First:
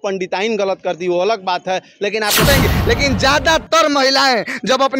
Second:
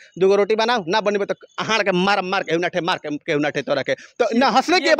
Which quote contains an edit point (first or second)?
first